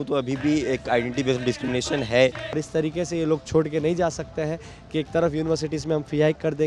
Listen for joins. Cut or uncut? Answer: cut